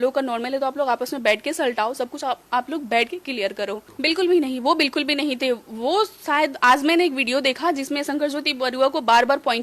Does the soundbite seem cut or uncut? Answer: cut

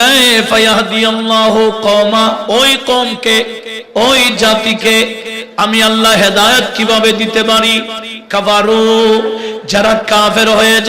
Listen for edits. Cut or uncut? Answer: cut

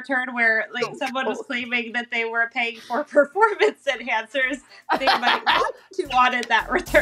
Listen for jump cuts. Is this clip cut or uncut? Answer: uncut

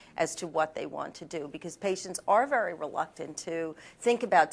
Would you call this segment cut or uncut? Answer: uncut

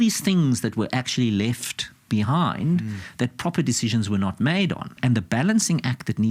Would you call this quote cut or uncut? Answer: cut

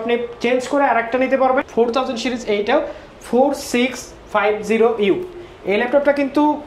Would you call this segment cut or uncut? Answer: cut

